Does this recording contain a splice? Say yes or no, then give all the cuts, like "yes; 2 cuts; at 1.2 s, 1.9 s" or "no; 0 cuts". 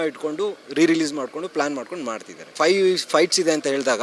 yes; 1 cut; at 2.5 s